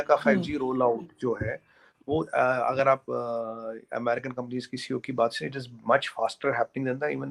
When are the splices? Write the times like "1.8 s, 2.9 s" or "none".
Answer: none